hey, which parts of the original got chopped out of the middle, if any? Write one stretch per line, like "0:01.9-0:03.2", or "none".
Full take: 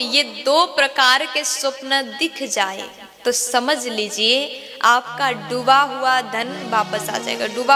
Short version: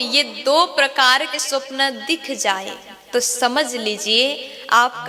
0:01.4-0:01.5